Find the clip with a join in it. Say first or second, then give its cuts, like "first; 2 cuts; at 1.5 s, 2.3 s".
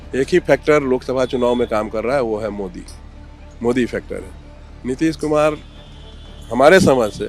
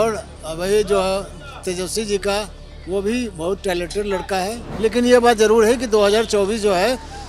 second; 1 cut; at 4.6 s